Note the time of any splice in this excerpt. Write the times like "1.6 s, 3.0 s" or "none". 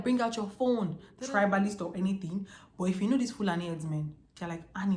1.1 s